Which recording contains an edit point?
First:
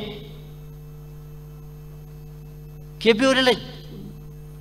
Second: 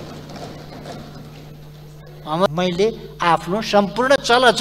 second; 1 cut; at 2.5 s

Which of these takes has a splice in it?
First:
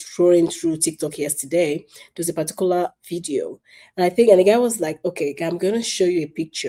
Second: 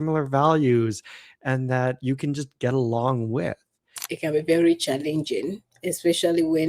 second; 1 cut; at 4.0 s

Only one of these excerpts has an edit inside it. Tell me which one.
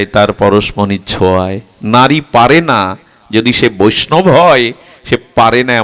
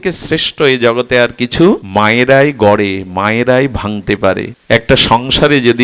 second; 2 cuts; at 1.8 s, 4.5 s

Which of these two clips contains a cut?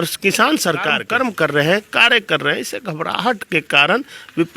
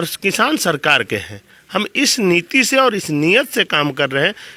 first; 1 cut; at 1.0 s

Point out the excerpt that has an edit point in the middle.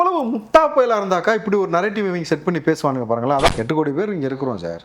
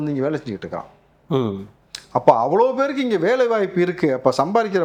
first; 1 cut; at 3.5 s

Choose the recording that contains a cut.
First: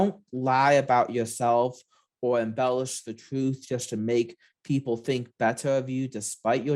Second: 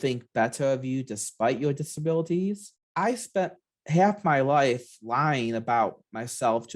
second; 1 cut; at 2.7 s

